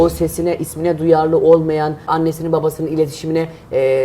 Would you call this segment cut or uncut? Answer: cut